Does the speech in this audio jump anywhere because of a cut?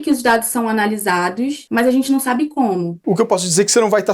yes; 2 cuts; at 1.6 s, 2.9 s

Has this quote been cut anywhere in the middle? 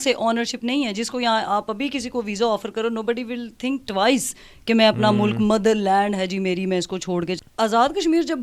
yes; 1 cut; at 7.4 s

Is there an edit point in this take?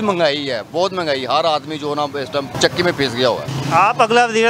yes; 1 cut; at 2.5 s

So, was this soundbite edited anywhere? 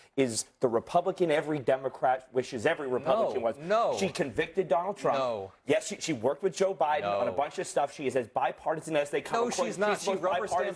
no; 0 cuts

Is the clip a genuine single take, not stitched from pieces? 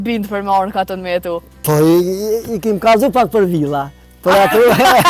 no; 1 cut; at 1.5 s

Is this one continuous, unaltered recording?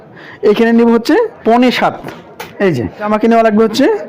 no; 2 cuts; at 1.4 s, 3.1 s

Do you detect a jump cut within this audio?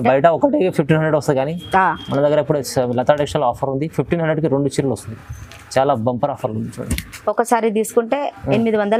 no; 0 cuts

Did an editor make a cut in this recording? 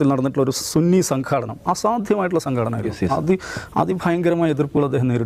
no; 0 cuts

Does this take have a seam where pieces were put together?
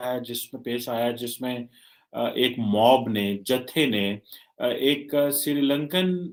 no; 0 cuts

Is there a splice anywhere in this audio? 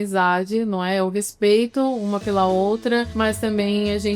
yes; 1 cut; at 3.1 s

